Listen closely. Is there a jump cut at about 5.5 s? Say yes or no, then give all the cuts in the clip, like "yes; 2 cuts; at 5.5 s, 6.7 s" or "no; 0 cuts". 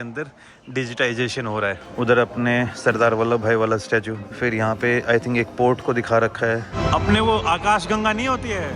no; 3 cuts; at 1.9 s, 4.2 s, 6.8 s